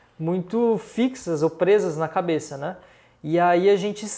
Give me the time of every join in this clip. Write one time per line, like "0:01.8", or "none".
none